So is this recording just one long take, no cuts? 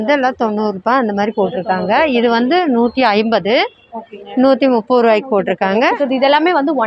no; 1 cut; at 6.0 s

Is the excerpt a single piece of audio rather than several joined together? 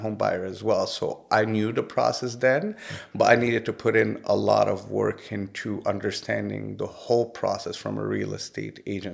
yes; 0 cuts

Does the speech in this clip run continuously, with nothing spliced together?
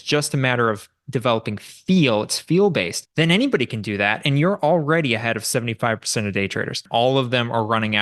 no; 2 cuts; at 3.0 s, 6.8 s

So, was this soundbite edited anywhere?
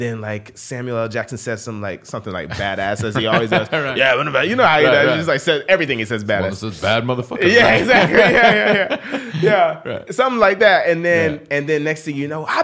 no; 0 cuts

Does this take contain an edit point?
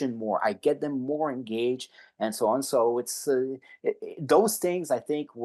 no; 0 cuts

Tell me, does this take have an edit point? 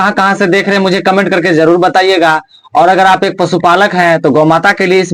no; 0 cuts

